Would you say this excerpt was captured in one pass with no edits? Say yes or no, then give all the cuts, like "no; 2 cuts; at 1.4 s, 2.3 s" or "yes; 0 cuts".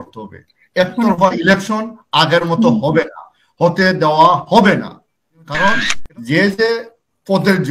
no; 1 cut; at 6.0 s